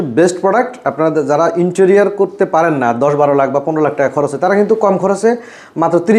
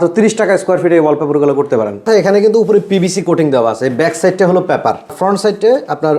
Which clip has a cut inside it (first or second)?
second